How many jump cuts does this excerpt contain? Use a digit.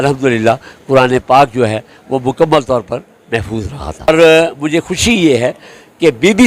1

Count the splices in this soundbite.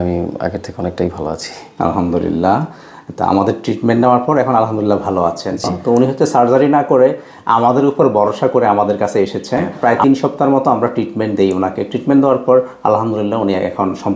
2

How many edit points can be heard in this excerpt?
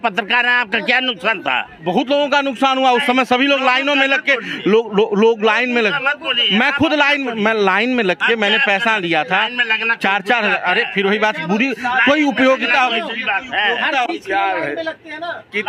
0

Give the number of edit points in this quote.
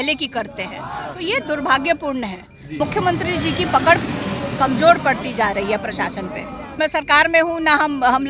2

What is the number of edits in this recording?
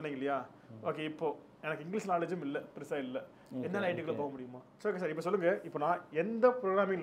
1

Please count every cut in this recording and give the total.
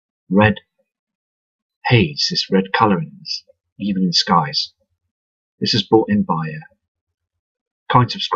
1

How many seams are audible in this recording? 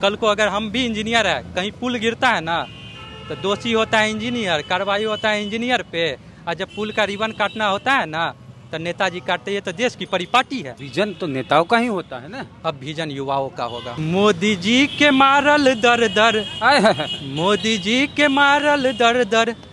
2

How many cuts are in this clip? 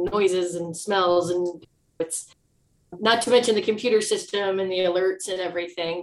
0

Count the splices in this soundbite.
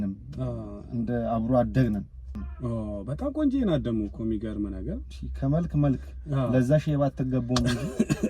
1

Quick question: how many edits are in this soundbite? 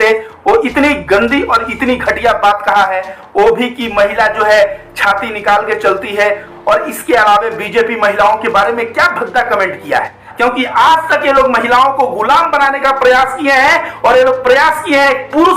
1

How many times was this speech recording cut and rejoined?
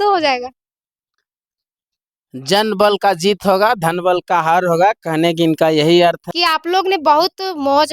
1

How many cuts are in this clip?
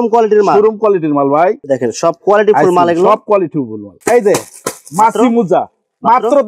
2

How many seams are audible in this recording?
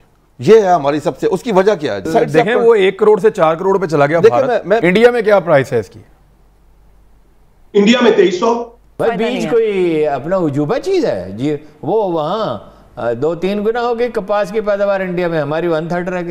3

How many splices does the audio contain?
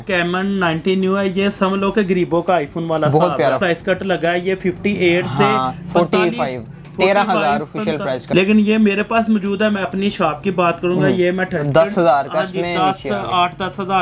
3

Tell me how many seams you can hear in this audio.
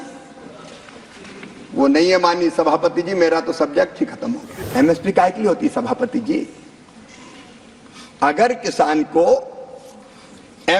1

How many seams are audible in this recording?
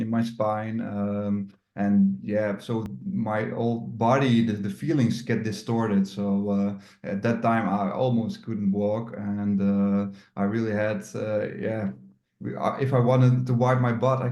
0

